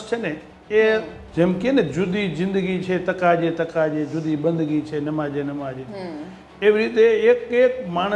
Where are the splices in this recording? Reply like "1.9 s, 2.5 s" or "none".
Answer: 1.2 s

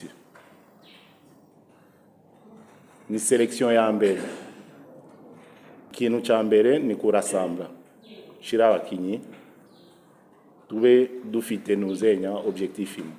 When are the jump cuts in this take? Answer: 5.9 s

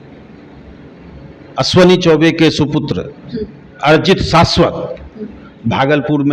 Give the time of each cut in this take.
none

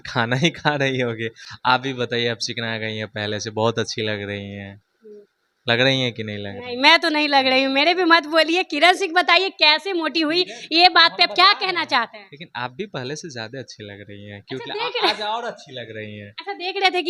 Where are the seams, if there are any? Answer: none

